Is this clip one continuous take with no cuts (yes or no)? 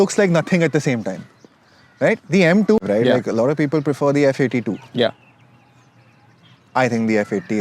no